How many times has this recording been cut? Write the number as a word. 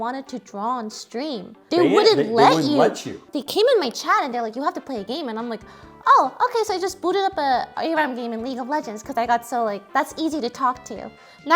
two